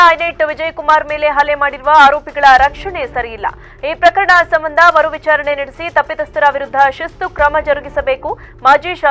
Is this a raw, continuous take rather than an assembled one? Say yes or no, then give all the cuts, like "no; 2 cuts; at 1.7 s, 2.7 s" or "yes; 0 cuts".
yes; 0 cuts